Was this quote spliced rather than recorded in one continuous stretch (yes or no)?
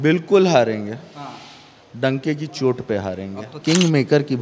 yes